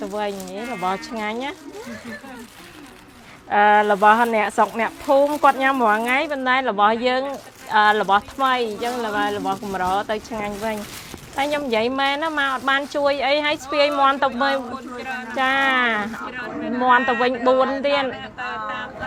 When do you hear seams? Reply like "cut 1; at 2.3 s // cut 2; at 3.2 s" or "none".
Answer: none